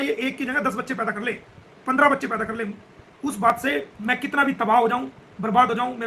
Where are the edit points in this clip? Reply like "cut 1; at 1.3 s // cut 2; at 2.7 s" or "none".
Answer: cut 1; at 3.9 s